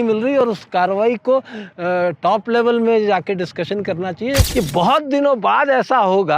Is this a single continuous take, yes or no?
no